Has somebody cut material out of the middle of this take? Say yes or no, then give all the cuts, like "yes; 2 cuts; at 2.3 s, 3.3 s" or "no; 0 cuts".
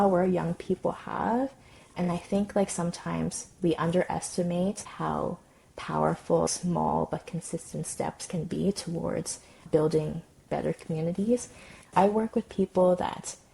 no; 0 cuts